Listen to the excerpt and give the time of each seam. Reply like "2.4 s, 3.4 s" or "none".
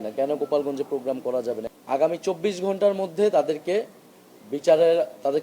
1.7 s